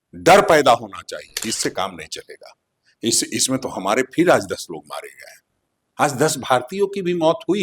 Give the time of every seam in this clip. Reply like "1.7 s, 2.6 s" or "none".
1.4 s

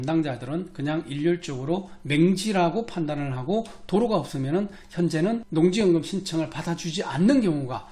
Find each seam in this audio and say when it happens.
5.5 s

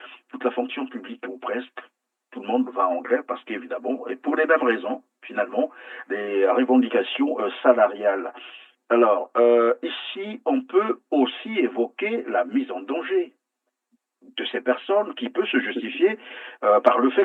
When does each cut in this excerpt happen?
none

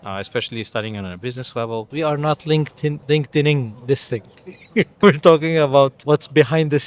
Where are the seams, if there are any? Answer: 1.9 s, 3.0 s, 5.0 s, 6.0 s

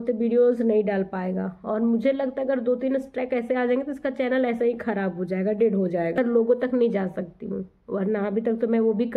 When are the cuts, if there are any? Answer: 6.2 s

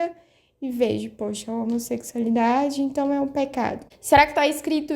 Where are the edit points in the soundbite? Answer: 3.9 s

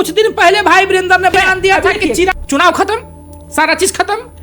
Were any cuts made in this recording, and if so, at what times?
2.3 s

